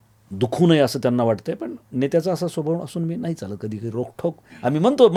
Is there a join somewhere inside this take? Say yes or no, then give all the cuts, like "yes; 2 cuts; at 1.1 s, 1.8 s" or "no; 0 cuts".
no; 0 cuts